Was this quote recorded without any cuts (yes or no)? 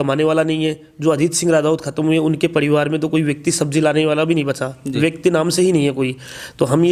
yes